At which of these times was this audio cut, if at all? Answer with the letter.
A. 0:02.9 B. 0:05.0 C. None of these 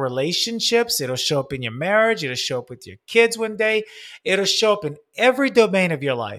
C